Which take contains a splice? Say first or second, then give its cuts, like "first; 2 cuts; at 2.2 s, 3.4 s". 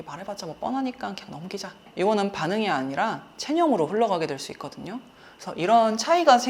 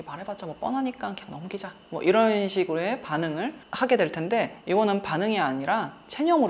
first; 1 cut; at 1.9 s